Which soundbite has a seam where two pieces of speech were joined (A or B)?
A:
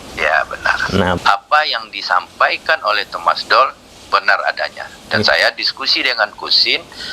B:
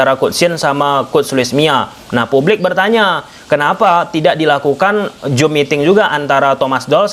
A